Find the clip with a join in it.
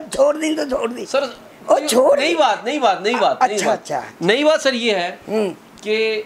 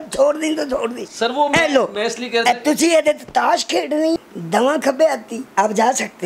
second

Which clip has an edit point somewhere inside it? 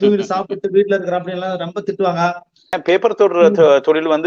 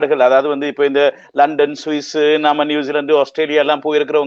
first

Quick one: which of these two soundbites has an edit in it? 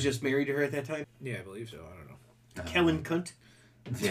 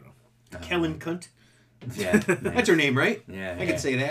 first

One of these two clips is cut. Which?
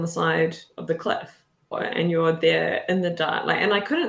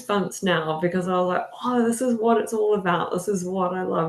first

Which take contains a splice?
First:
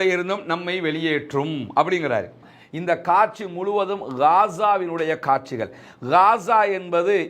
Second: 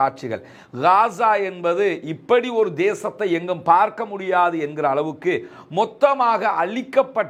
first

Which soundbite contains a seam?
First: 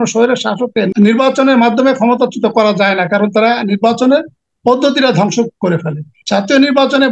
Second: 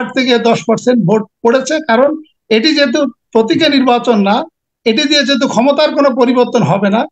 first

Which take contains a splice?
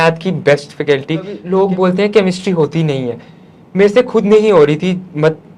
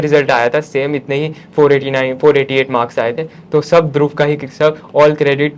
first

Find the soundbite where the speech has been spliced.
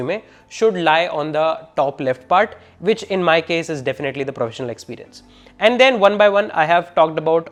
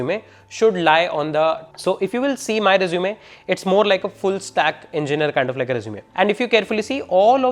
second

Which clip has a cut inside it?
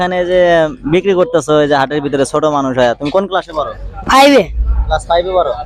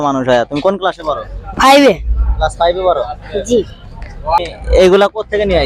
second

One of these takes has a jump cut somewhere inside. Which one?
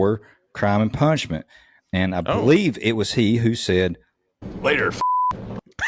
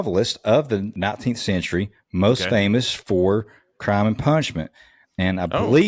second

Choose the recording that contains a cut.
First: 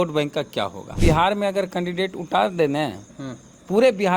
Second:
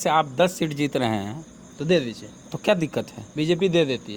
first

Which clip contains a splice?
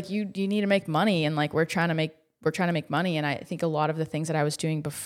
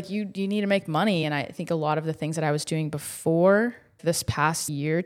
second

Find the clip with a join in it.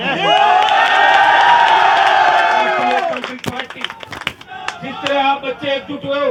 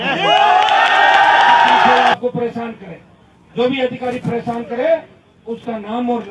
second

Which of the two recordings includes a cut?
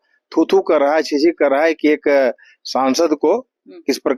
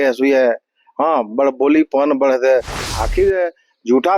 second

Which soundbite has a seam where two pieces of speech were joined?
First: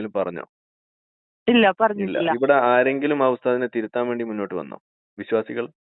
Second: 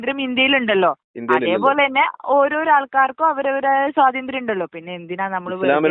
first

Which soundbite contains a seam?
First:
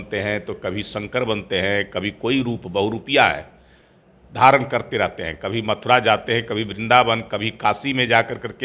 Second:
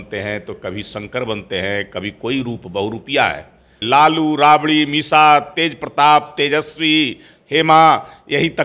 second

